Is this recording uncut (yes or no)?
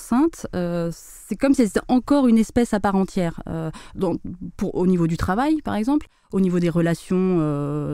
yes